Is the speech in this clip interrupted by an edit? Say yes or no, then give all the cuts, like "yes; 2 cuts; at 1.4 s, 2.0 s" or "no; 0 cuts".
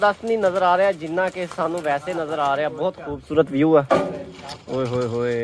no; 0 cuts